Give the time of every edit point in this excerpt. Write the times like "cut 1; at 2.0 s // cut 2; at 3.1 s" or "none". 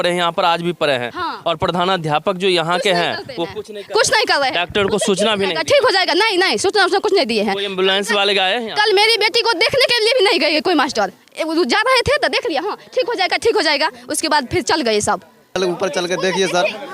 cut 1; at 15.6 s